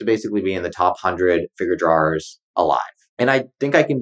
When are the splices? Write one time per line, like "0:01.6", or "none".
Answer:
0:02.6